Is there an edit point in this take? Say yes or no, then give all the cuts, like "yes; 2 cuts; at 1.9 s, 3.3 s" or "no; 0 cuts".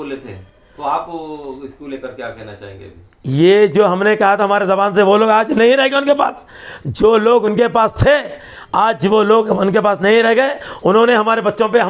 no; 0 cuts